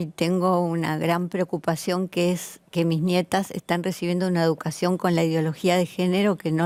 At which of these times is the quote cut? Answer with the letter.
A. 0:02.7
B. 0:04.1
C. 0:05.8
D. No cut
D